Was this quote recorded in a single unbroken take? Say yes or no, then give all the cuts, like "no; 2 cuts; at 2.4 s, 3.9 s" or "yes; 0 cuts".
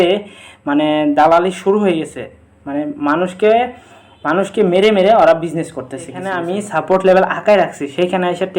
no; 1 cut; at 6.4 s